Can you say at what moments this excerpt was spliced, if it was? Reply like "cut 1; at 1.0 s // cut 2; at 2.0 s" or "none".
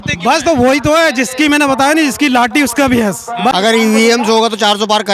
cut 1; at 3.5 s